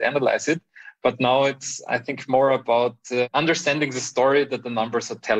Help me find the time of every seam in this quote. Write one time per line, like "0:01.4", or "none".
0:03.3